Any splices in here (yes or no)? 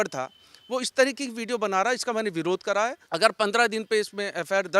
yes